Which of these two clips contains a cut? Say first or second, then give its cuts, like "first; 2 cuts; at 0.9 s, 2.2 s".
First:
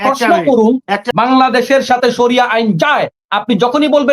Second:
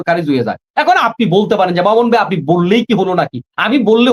first; 1 cut; at 1.1 s